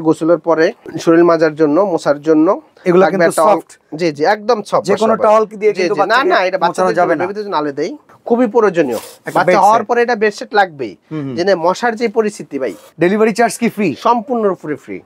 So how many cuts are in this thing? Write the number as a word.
four